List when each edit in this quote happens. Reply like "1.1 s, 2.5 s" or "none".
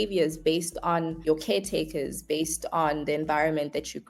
1.2 s